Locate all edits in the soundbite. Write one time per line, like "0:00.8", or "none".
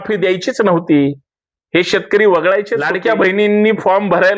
0:02.8